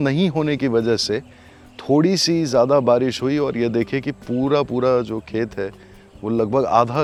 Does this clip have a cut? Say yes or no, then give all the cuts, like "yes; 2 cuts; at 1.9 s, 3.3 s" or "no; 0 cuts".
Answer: no; 0 cuts